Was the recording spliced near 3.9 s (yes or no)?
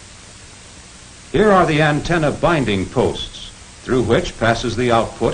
no